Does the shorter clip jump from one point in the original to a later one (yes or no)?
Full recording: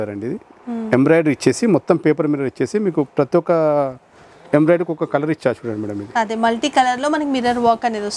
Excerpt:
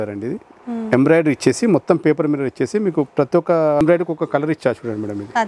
yes